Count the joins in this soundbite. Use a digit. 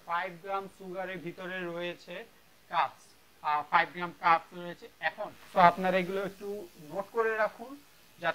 1